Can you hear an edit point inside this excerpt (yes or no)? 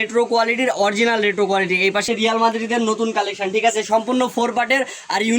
yes